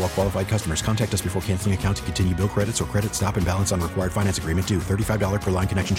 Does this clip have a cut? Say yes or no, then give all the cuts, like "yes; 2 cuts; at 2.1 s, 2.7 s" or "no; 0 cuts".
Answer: no; 0 cuts